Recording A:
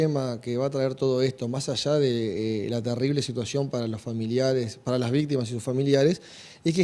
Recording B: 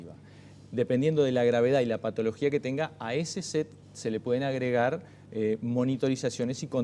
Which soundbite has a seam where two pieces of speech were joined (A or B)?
B